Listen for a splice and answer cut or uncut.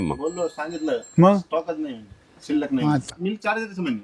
cut